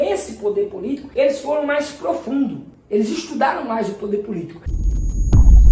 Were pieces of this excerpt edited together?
yes; 2 cuts; at 1.0 s, 4.6 s

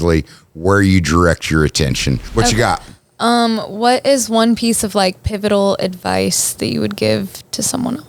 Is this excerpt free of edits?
no; 1 cut; at 2.2 s

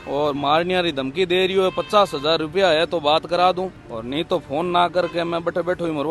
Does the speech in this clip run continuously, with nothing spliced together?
yes; 0 cuts

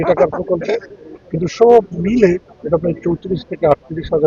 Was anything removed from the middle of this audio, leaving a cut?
no; 0 cuts

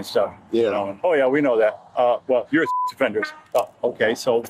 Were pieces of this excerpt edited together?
no; 0 cuts

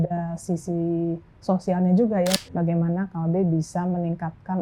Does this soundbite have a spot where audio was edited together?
yes; 1 cut; at 2.3 s

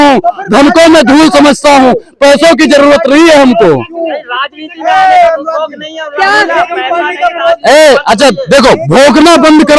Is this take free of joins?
yes; 0 cuts

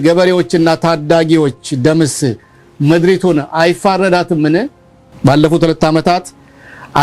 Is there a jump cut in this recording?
no; 0 cuts

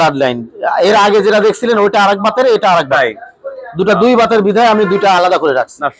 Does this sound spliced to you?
no; 0 cuts

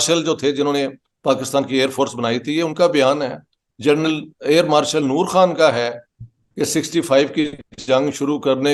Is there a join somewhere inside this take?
no; 0 cuts

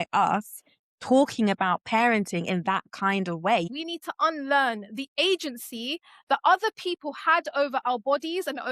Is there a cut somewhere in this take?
yes; 1 cut; at 3.7 s

